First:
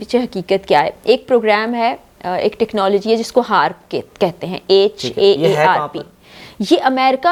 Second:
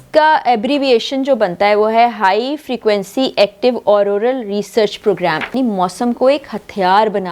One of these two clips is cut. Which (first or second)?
second